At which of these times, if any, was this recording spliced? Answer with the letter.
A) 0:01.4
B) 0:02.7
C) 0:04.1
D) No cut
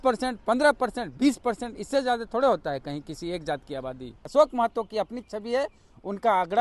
C